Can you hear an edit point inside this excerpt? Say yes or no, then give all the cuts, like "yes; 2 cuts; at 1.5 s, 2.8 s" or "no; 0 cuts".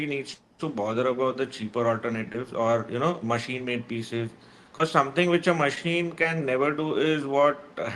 no; 0 cuts